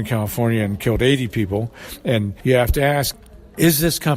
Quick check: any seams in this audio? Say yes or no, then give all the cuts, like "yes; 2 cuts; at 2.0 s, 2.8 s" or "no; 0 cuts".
yes; 2 cuts; at 2.3 s, 3.1 s